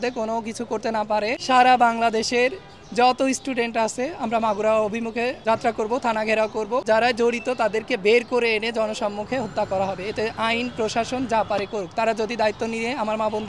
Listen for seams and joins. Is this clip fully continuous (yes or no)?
no